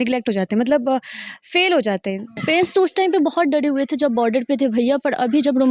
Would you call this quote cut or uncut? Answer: cut